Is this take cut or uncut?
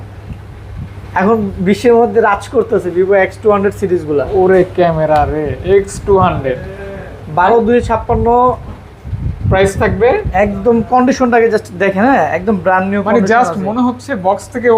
uncut